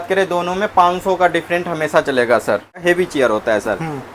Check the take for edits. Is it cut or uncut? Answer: cut